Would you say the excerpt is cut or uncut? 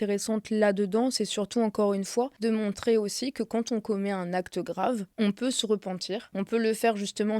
cut